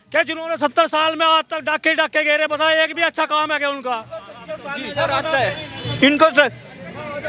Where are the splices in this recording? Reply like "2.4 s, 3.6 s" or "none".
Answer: none